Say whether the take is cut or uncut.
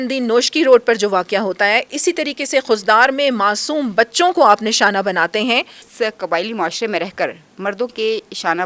cut